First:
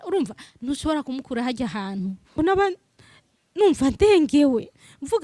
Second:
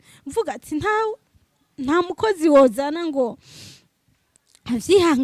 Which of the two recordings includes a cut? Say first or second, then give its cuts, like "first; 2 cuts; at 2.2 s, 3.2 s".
first; 1 cut; at 2.4 s